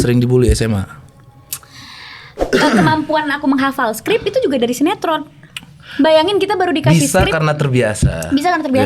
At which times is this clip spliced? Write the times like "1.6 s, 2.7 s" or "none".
2.3 s